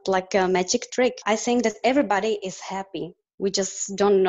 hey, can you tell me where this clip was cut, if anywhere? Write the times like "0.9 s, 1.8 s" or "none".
1.2 s